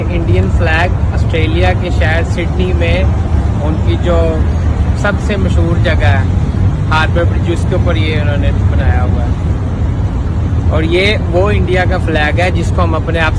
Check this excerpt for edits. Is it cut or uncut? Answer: uncut